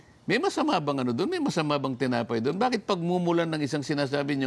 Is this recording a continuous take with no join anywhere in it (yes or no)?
yes